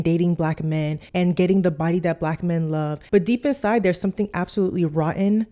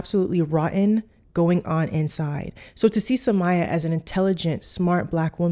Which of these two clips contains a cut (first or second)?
first